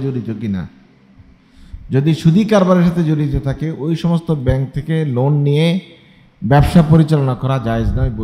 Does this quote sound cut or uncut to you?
uncut